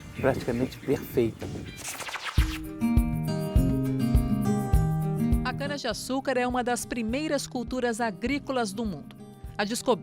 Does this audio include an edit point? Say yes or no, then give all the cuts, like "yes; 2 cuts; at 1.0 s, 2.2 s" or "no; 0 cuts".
yes; 1 cut; at 1.8 s